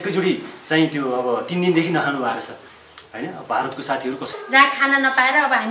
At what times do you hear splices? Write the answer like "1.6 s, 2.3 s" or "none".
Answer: 4.3 s